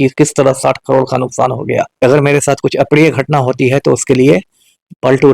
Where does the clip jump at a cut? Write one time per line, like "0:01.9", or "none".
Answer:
0:02.0